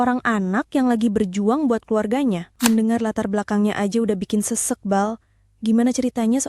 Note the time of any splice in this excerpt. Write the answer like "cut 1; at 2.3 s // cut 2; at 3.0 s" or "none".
cut 1; at 2.5 s